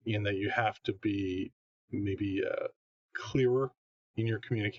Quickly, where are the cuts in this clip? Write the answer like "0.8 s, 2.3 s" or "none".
none